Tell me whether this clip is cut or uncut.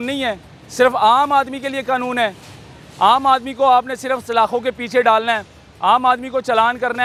uncut